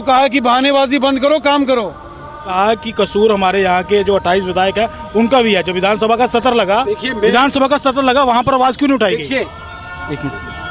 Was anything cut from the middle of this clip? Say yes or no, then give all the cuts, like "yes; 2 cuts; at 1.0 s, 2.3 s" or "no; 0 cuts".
yes; 1 cut; at 2.5 s